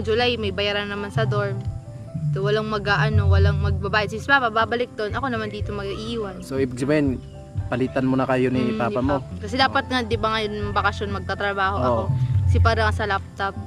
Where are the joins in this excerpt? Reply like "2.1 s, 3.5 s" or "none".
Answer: 9.4 s

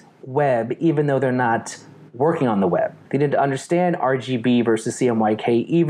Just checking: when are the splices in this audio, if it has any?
3.0 s

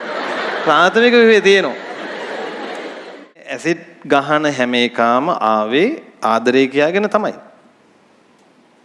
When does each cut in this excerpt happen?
3.7 s

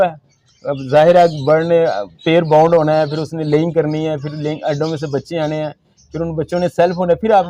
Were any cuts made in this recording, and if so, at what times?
none

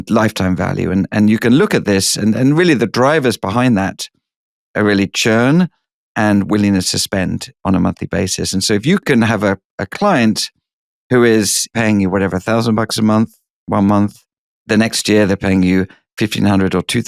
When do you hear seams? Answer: 11.7 s

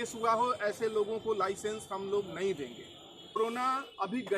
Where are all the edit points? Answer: 3.4 s

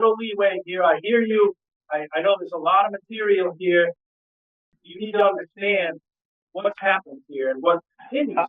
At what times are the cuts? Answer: 4.4 s

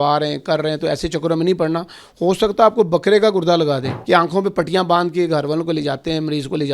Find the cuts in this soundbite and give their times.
3.9 s

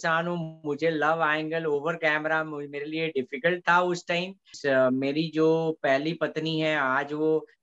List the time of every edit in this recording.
4.5 s

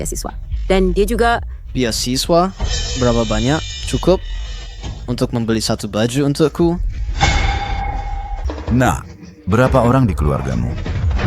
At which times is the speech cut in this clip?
8.4 s

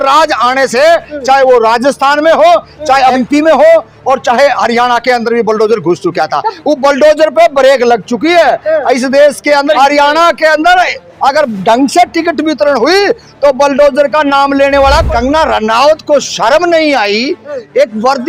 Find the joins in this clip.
3.2 s, 9.8 s, 15.0 s

